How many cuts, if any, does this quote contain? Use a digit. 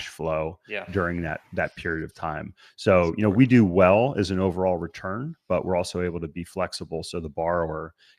0